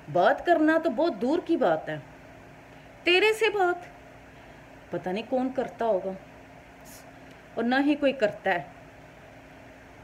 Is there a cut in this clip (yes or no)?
no